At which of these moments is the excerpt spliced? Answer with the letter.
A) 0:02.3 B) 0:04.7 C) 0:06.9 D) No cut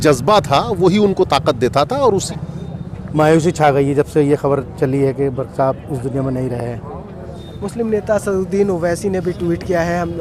A